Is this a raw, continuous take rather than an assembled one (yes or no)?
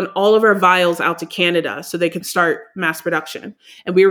no